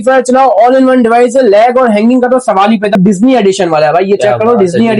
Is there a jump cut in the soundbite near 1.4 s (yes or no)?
no